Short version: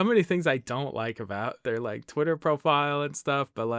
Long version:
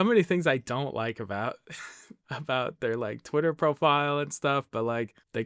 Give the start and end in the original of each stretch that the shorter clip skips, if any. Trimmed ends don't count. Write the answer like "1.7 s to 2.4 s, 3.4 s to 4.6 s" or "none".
1.6 s to 2.8 s

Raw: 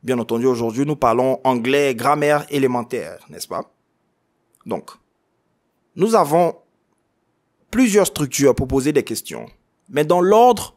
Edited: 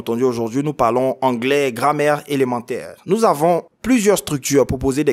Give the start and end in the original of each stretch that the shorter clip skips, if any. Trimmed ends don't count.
3.1 s to 5.8 s, 6.6 s to 7.6 s

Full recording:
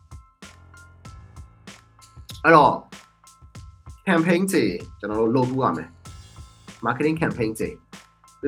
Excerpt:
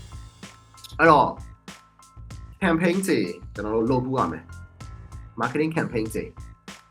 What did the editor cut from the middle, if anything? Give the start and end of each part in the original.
2.2 s to 2.4 s

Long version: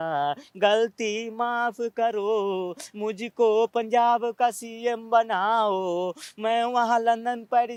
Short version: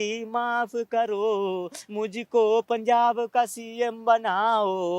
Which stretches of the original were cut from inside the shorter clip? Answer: none

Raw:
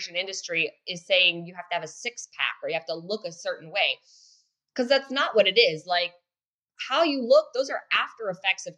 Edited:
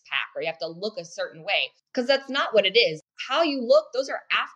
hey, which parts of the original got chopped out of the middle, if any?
4.0 s to 4.6 s, 5.8 s to 6.6 s

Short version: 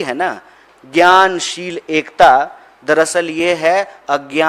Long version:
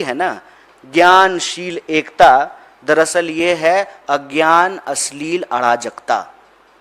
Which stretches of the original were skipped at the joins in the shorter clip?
none

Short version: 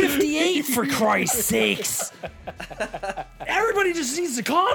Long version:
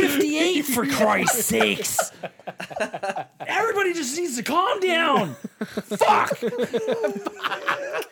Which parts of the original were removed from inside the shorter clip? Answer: none

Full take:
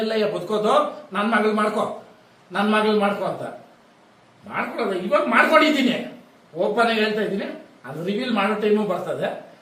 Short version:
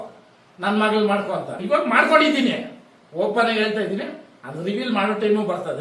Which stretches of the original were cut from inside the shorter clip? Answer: 3.5 s to 5.0 s

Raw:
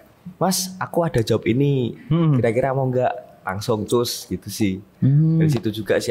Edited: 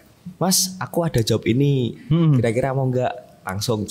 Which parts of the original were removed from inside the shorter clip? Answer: none

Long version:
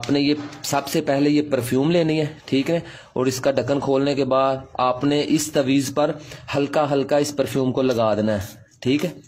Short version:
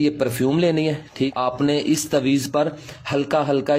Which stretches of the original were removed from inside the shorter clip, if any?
2.6 s to 4.7 s

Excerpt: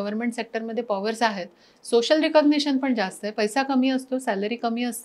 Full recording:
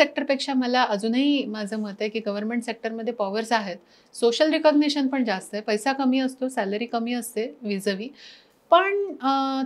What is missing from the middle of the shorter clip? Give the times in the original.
none

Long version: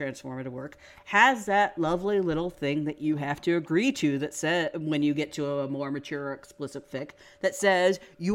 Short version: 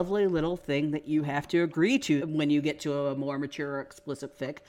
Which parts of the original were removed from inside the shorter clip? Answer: 4.2 s to 4.7 s

